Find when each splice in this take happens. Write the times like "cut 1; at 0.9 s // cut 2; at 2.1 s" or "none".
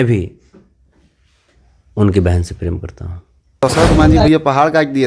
cut 1; at 3.6 s